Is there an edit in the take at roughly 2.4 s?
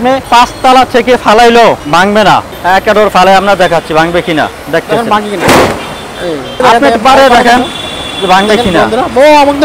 yes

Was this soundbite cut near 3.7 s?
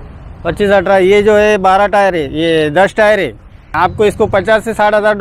yes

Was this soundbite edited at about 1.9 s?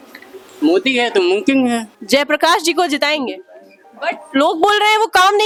no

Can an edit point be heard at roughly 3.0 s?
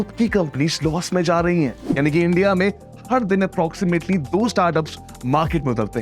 no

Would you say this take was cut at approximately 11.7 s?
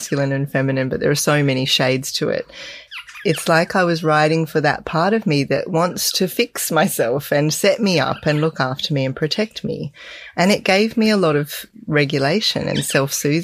yes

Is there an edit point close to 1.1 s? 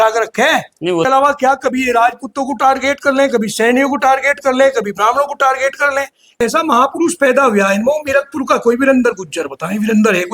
yes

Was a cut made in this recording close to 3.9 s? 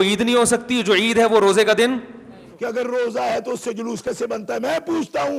no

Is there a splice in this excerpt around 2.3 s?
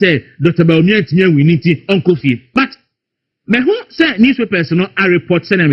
yes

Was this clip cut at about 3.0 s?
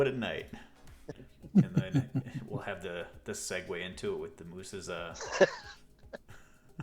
no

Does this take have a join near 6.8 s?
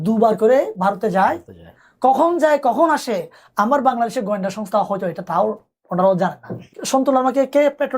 yes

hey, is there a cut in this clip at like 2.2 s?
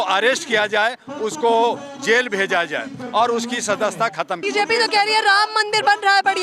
no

